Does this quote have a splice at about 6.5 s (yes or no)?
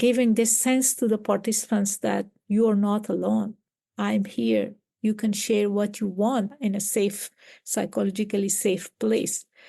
yes